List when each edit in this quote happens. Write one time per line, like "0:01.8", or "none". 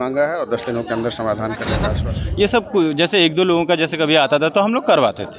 0:01.9